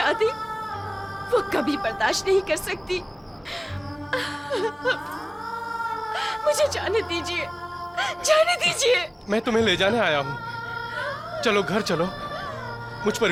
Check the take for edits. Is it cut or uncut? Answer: uncut